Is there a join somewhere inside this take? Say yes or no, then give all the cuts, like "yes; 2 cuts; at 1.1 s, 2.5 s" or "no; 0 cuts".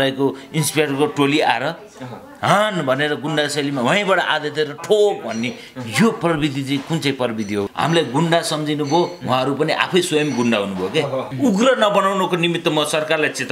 yes; 2 cuts; at 7.7 s, 11.3 s